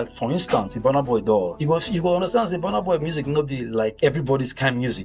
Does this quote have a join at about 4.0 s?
yes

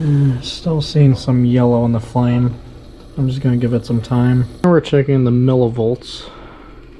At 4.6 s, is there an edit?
yes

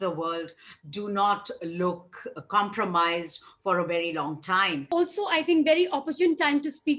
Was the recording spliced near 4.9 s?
yes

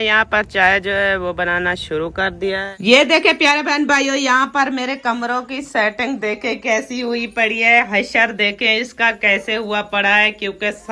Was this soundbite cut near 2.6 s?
yes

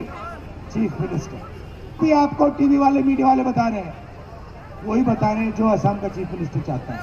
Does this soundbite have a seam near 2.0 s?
yes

